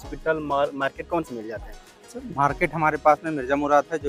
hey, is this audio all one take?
yes; 0 cuts

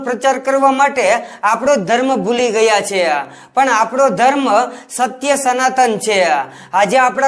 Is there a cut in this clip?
no; 0 cuts

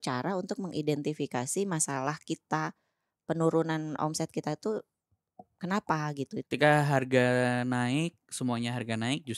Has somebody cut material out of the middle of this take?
yes; 1 cut; at 6.4 s

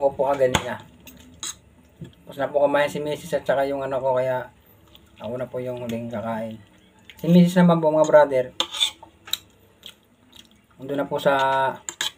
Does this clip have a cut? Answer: no; 0 cuts

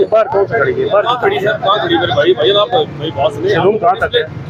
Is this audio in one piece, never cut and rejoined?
yes; 0 cuts

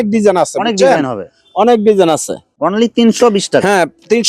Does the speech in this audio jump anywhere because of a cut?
yes; 1 cut; at 2.5 s

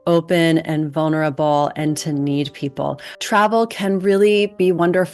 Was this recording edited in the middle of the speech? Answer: yes; 1 cut; at 3.1 s

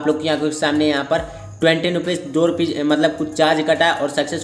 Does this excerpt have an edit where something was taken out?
no; 0 cuts

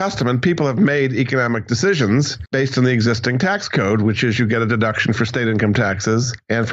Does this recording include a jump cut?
no; 0 cuts

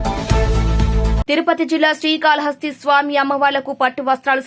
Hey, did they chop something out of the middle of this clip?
yes; 1 cut; at 1.0 s

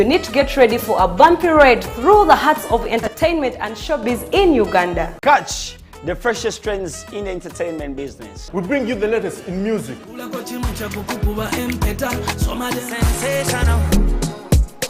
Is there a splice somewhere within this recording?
no; 0 cuts

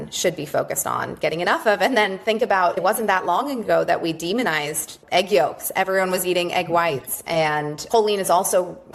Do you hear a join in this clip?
no; 0 cuts

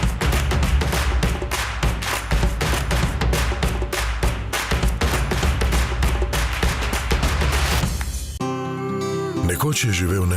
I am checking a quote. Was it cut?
no; 0 cuts

